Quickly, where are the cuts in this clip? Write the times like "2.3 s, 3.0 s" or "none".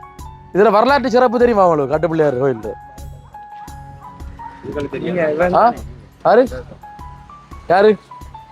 2.7 s, 4.6 s